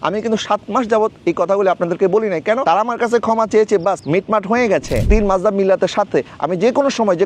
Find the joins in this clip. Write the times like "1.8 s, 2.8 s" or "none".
4.0 s, 5.1 s

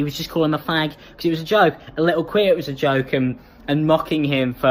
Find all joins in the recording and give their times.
none

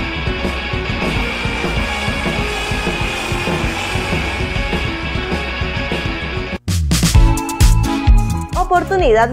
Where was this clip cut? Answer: 6.6 s

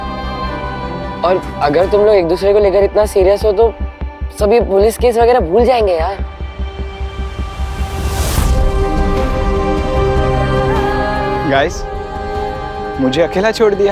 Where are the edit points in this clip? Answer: none

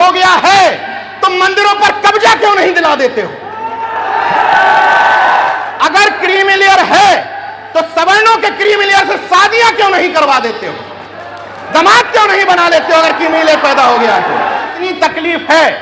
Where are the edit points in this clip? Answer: 5.6 s, 14.7 s

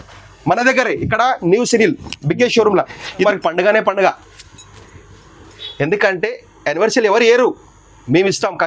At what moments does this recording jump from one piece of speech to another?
3.2 s

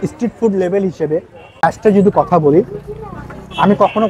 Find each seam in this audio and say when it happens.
1.6 s

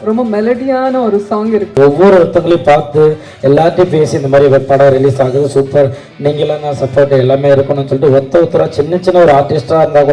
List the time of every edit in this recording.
1.8 s

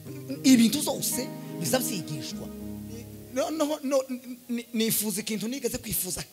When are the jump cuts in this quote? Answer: 3.2 s

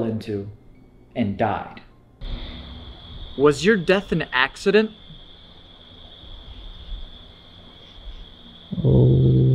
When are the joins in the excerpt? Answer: 2.2 s

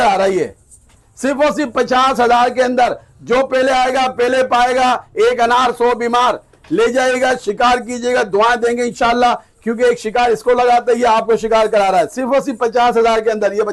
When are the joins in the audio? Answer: none

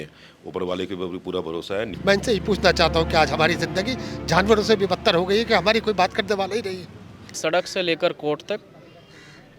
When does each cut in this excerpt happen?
1.9 s, 7.3 s

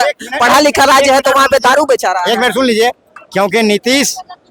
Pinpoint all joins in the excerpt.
none

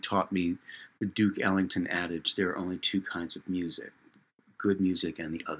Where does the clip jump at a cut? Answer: none

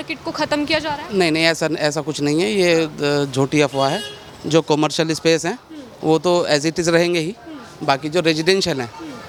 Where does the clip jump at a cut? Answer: none

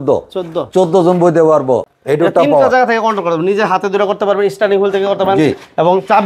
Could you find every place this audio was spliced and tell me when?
2.0 s

